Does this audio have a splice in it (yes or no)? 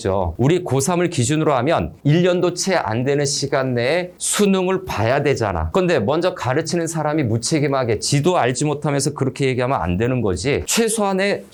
no